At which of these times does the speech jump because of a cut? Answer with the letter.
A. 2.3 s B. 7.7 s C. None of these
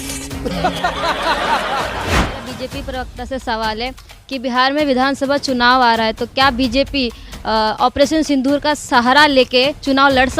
A